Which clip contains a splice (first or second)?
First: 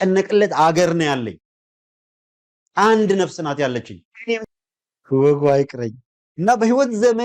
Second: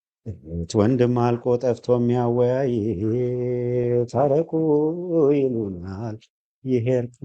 first